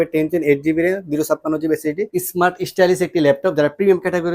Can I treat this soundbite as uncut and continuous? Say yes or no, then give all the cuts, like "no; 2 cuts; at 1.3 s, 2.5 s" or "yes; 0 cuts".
no; 1 cut; at 2.2 s